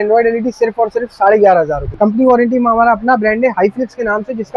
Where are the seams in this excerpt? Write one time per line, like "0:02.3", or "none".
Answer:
0:01.8